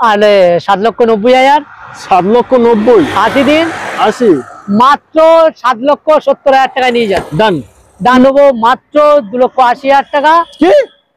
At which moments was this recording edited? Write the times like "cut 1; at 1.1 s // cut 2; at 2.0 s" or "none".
cut 1; at 8.1 s